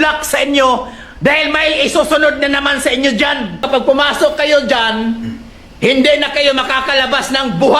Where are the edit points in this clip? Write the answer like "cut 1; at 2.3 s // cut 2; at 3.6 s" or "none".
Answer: cut 1; at 3.6 s